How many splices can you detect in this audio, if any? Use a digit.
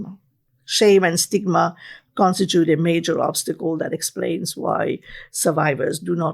0